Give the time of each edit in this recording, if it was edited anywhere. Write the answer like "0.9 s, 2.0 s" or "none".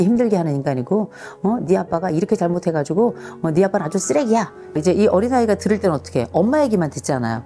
4.6 s

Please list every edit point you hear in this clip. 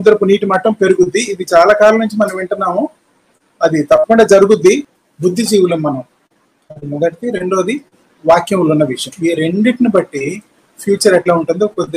4.9 s

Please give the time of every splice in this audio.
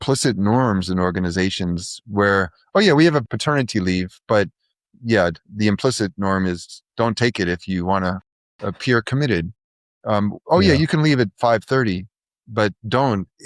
3.3 s

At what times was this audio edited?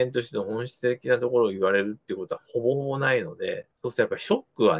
none

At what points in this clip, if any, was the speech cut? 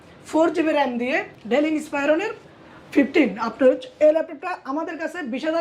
1.3 s

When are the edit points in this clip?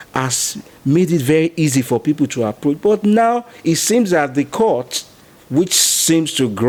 none

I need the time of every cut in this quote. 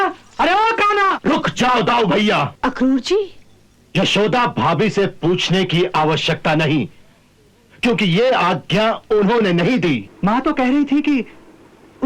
1.2 s, 2.5 s, 10.1 s

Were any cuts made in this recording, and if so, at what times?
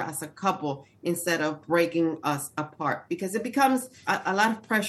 3.9 s

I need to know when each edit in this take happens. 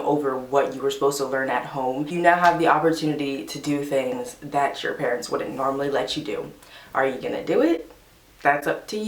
2.1 s

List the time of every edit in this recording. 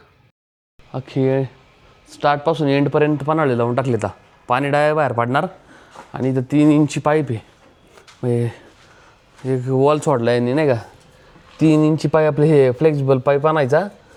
none

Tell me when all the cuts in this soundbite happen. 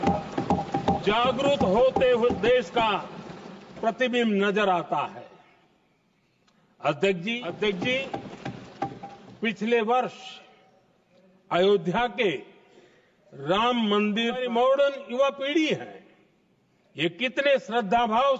7.5 s, 14.4 s

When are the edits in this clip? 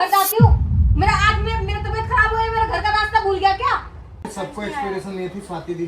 4.3 s

